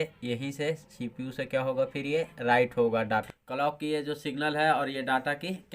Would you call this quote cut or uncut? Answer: cut